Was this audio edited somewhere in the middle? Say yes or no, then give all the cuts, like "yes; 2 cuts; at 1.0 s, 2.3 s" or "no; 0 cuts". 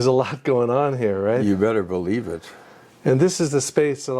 no; 0 cuts